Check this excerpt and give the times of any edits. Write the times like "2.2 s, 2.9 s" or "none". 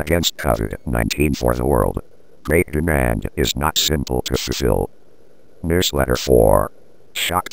5.4 s